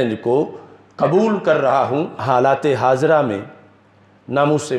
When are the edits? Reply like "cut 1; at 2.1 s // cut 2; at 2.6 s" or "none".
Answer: cut 1; at 2.2 s